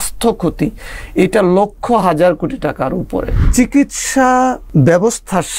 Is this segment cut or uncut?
cut